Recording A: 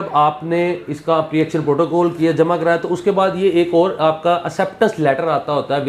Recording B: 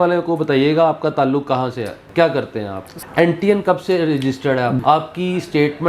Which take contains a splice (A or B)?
B